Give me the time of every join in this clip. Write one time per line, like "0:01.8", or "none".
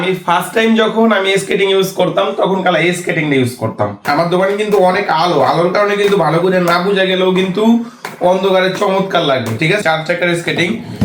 0:04.0
0:09.8